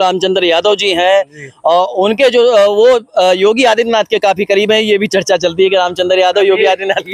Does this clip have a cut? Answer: no; 0 cuts

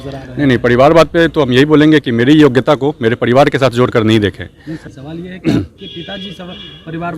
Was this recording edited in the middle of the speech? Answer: yes; 1 cut; at 4.9 s

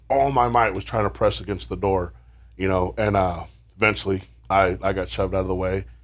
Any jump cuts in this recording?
no; 0 cuts

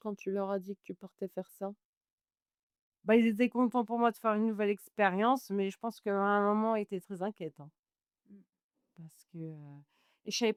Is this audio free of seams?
yes; 0 cuts

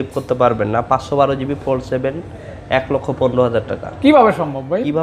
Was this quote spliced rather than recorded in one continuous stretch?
no; 0 cuts

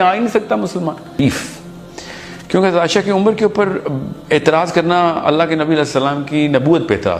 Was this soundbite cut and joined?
yes; 1 cut; at 1.2 s

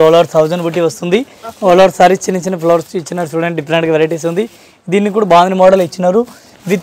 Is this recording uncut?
yes; 0 cuts

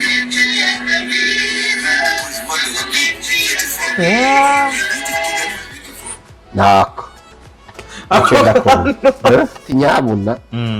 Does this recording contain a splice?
yes; 1 cut; at 9.6 s

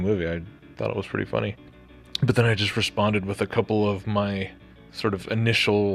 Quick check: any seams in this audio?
no; 0 cuts

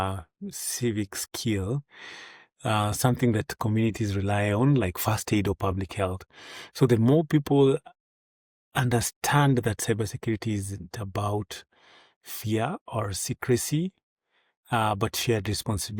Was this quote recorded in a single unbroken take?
yes; 0 cuts

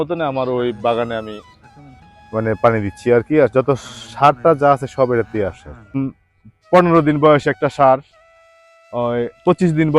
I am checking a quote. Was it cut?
yes; 1 cut; at 6.0 s

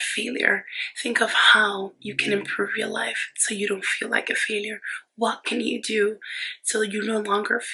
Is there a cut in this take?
no; 0 cuts

